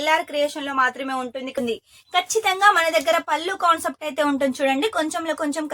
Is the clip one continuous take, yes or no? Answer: no